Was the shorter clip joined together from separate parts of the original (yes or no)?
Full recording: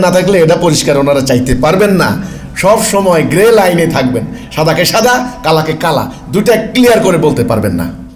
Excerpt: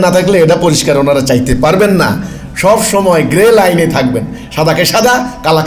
no